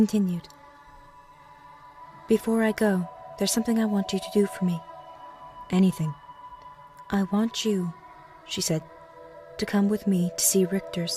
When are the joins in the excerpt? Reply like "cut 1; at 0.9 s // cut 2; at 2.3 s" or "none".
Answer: cut 1; at 2.5 s